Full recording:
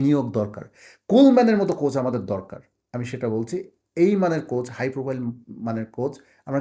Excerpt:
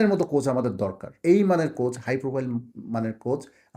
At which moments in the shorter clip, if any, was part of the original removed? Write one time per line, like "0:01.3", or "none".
0:01.1